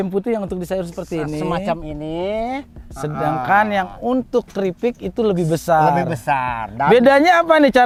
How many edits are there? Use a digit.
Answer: 0